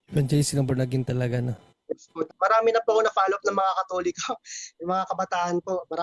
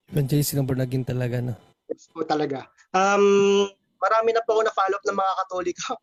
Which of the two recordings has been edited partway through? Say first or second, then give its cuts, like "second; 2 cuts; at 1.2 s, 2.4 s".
first; 1 cut; at 2.2 s